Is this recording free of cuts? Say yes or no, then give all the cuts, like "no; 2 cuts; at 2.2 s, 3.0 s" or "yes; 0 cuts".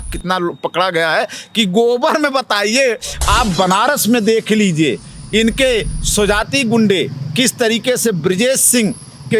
no; 1 cut; at 3.1 s